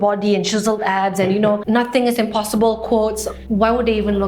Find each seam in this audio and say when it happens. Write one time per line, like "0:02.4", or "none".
0:01.6
0:03.3